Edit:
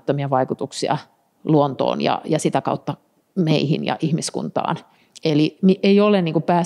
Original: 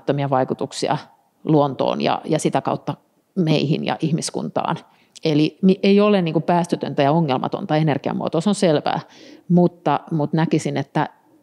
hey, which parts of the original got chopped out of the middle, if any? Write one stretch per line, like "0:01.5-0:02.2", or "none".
none